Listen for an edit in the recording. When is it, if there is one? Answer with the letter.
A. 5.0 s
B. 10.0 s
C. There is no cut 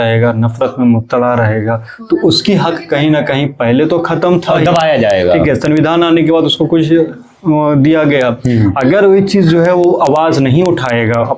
C